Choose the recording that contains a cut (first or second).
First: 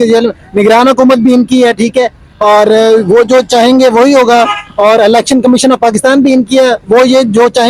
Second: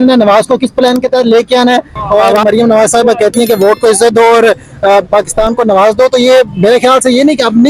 second